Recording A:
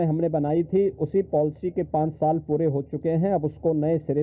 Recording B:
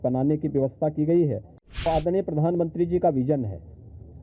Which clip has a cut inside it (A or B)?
B